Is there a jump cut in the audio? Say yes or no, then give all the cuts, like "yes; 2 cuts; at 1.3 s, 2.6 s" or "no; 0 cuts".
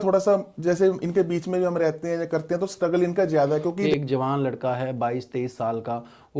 yes; 1 cut; at 3.8 s